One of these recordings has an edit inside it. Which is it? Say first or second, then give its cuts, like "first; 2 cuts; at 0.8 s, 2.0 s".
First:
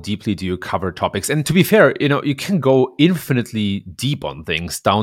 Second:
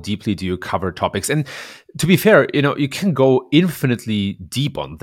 first; 1 cut; at 1.5 s